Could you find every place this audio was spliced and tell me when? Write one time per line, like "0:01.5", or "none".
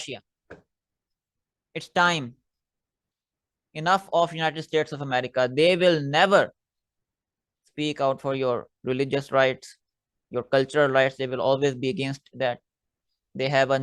none